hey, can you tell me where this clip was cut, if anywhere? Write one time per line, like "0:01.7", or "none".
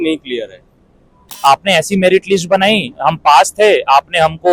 0:01.2